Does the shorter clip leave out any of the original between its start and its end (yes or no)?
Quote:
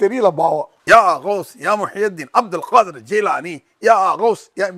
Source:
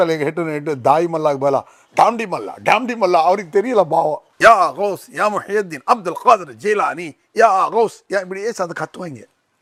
no